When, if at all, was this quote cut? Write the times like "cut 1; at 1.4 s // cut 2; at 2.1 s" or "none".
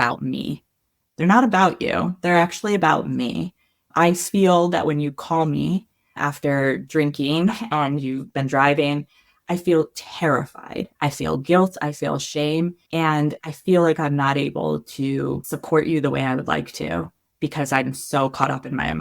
cut 1; at 10.9 s // cut 2; at 12.8 s // cut 3; at 15.5 s